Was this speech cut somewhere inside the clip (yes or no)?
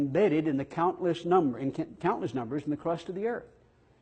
yes